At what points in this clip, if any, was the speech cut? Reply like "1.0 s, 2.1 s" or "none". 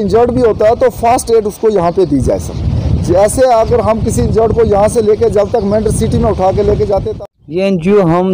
7.1 s